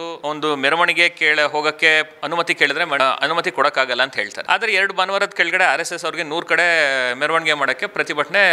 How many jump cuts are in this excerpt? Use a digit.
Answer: 0